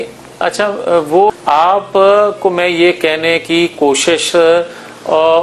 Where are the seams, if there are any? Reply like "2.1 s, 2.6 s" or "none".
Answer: 1.3 s